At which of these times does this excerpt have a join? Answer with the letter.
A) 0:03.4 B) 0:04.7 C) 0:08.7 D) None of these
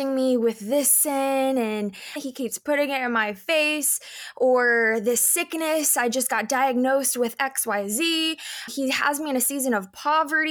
C